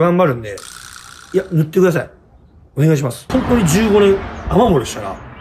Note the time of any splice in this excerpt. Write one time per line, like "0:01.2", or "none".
0:03.2